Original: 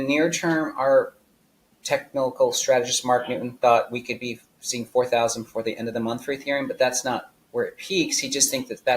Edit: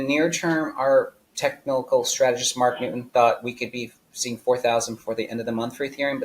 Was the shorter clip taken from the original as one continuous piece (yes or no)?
no